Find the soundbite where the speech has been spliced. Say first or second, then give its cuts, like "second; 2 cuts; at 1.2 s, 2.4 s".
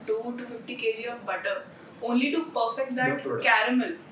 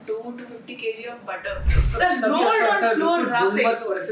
second; 1 cut; at 1.8 s